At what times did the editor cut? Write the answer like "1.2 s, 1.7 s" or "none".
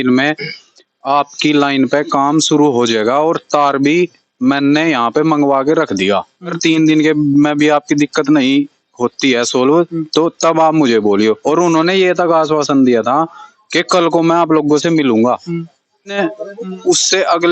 6.6 s, 16.2 s

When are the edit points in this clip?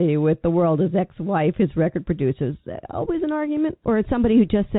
3.8 s

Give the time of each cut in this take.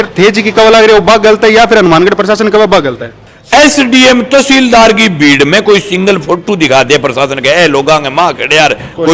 3.3 s

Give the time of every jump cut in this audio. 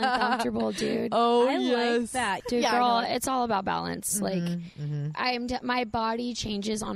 2.4 s

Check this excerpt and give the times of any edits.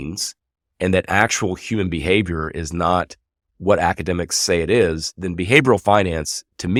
none

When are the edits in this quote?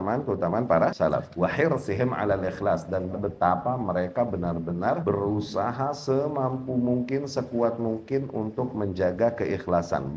1.0 s, 3.1 s, 5.0 s

